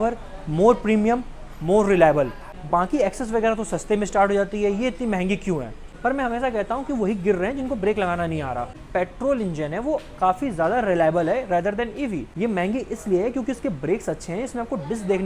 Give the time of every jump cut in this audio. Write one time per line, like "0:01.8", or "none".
0:02.5
0:05.8
0:08.8
0:12.3